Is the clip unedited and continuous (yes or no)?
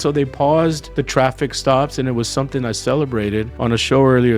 no